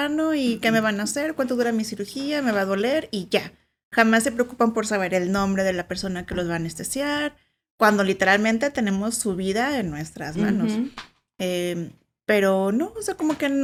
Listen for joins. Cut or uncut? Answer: uncut